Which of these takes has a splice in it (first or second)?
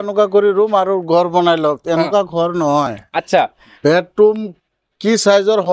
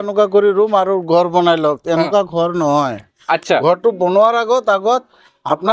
second